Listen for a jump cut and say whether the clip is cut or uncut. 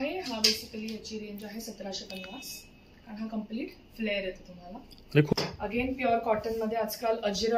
cut